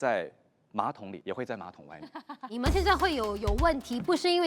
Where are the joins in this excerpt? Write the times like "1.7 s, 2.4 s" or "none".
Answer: 1.1 s, 2.5 s